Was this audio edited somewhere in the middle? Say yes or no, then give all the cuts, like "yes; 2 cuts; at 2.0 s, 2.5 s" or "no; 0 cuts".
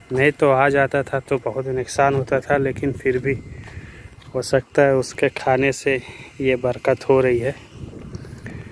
no; 0 cuts